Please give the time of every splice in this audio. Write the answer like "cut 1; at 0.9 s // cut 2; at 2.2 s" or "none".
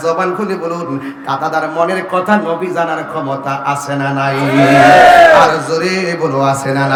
none